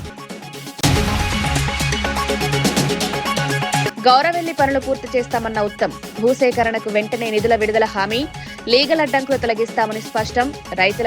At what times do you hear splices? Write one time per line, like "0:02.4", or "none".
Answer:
0:00.8
0:03.5